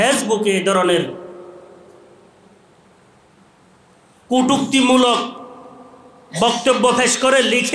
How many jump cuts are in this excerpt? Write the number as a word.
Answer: zero